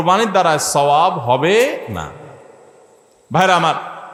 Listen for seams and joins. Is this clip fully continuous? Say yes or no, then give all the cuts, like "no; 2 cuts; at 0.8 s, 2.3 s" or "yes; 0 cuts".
yes; 0 cuts